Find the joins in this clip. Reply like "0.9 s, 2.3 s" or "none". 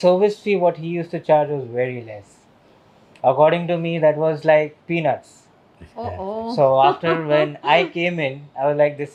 none